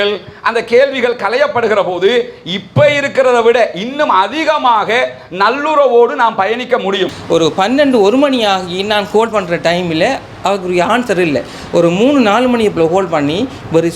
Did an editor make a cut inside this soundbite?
yes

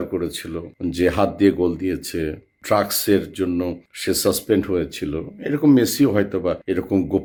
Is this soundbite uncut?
yes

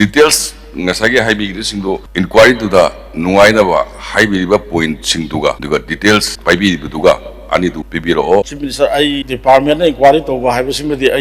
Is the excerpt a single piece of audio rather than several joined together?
no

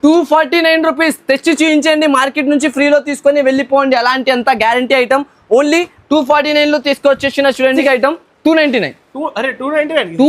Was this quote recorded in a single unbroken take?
no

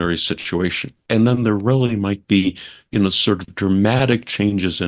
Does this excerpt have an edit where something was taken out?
yes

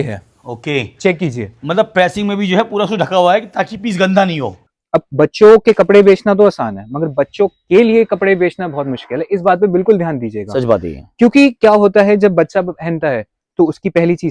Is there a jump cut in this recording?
yes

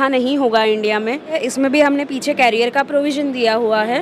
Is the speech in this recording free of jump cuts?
no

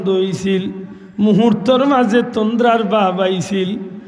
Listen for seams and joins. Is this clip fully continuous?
yes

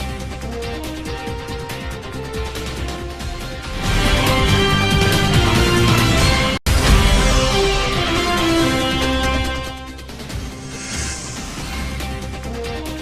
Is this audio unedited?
yes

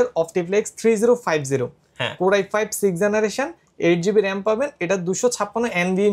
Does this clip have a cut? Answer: no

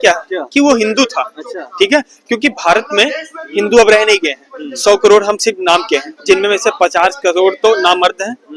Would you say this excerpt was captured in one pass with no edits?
yes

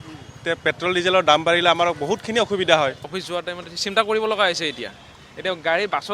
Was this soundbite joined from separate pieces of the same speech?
yes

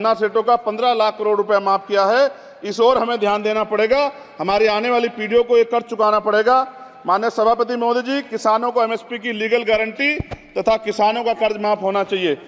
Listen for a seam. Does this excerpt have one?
no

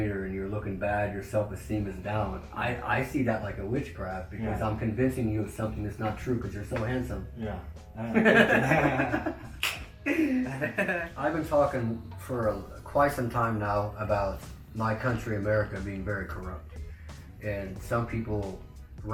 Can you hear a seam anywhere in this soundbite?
no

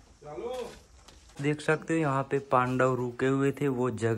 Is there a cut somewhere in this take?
yes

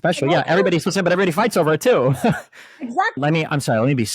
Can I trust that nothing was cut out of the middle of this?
no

